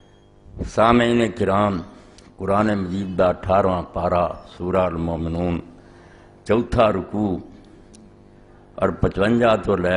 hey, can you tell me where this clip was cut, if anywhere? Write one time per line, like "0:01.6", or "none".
0:05.8